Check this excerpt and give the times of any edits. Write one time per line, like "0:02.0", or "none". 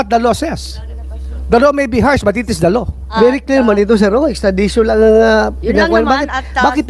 0:03.1